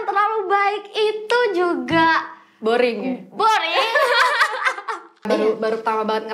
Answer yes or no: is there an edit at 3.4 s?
no